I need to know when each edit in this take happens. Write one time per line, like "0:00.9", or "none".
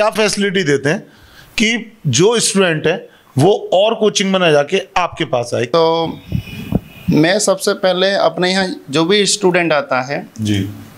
0:05.7